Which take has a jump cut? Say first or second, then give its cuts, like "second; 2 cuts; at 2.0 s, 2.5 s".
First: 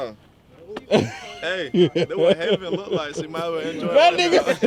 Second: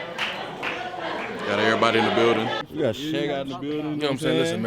second; 1 cut; at 2.7 s